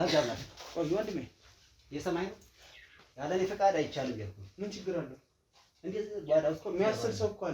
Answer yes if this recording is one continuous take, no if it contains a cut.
yes